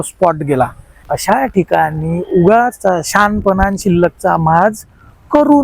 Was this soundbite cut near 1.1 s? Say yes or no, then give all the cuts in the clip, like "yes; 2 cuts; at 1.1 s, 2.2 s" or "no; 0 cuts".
yes; 1 cut; at 1.1 s